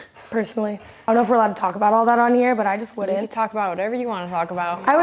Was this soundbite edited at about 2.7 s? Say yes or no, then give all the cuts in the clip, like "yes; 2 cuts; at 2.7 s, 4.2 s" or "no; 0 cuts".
no; 1 cut; at 1.1 s